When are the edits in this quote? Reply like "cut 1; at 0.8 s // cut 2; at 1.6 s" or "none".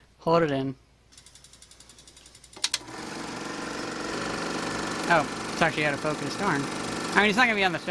cut 1; at 4.1 s

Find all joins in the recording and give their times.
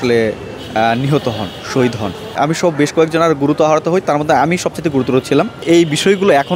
cut 1; at 2.3 s // cut 2; at 5.6 s

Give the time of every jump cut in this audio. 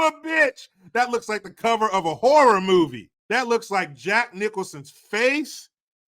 cut 1; at 3.1 s

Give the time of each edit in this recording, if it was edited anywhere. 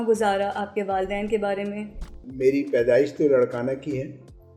cut 1; at 2.2 s

